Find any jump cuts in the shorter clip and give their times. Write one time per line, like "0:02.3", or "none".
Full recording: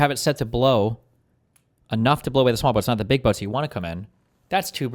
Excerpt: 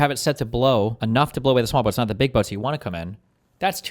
0:01.0